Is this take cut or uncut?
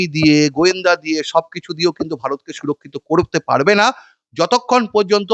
uncut